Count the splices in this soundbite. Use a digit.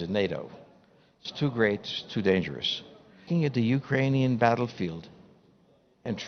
1